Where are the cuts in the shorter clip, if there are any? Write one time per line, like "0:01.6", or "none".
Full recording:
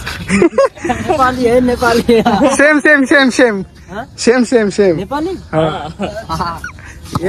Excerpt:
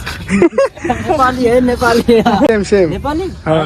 0:02.5